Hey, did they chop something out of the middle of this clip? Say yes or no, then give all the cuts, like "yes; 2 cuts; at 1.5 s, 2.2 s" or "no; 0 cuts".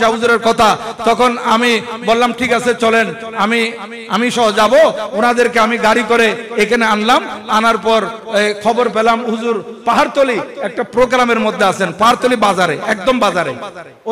no; 0 cuts